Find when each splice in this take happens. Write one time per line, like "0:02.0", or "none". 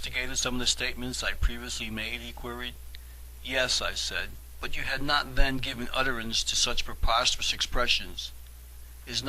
0:00.9